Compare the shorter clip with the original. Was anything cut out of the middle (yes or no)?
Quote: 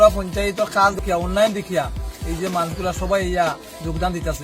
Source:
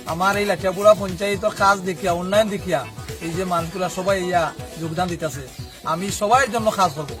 yes